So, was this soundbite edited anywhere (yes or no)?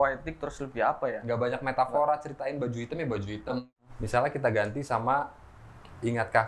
yes